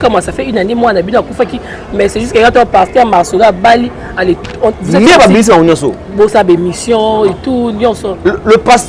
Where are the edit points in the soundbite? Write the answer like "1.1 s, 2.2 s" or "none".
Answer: none